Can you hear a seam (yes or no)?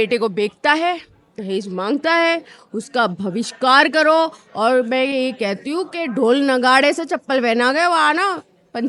no